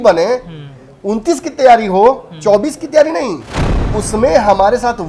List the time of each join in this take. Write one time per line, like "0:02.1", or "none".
0:04.0